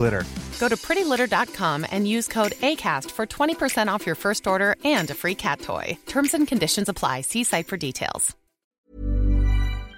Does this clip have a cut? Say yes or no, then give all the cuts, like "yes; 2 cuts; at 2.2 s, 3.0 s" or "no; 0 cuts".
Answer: yes; 1 cut; at 8.6 s